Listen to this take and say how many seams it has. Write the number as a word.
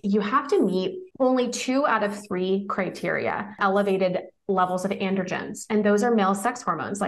one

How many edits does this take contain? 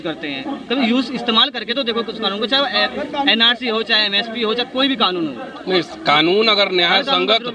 zero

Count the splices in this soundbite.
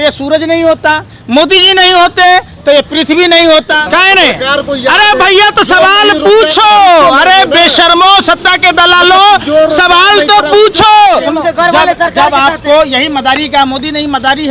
two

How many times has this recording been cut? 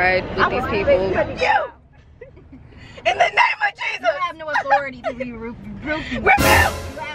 one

